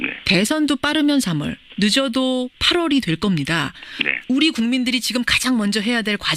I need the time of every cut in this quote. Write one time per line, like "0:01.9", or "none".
none